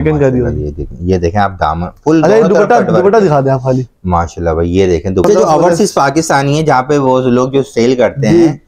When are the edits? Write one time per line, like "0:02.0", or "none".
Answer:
0:05.2